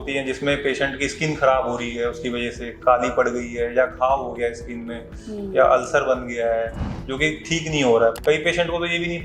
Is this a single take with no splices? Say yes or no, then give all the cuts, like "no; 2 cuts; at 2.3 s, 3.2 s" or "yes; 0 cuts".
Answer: no; 1 cut; at 8.1 s